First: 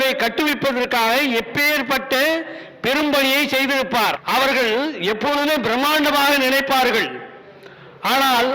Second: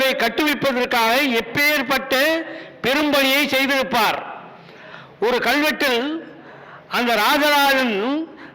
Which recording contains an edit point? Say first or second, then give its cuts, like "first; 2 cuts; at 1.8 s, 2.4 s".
first; 1 cut; at 4.2 s